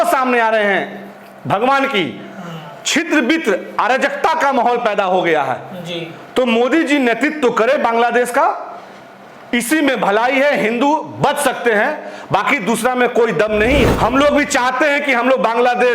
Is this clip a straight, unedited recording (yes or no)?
no